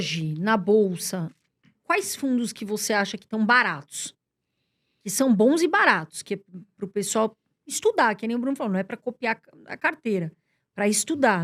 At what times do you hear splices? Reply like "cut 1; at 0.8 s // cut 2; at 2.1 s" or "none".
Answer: none